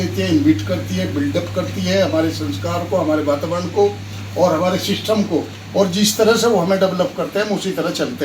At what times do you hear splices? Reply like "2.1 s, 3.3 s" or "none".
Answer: none